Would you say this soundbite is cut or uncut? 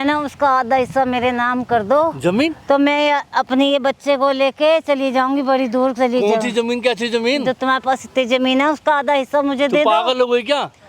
uncut